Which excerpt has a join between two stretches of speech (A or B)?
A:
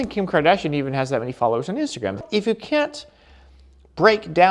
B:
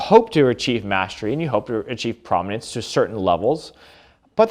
A